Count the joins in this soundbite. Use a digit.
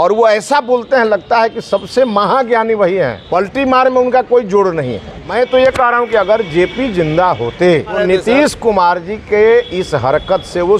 3